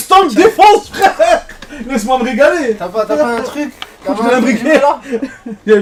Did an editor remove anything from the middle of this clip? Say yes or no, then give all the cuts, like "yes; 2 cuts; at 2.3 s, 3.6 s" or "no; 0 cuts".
no; 0 cuts